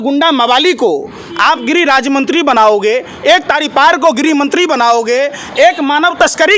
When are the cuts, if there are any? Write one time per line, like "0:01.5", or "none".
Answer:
none